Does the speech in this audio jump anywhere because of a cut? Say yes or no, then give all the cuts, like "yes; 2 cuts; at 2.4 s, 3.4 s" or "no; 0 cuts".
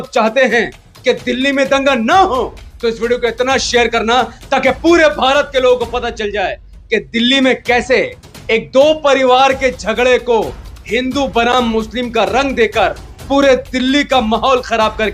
no; 0 cuts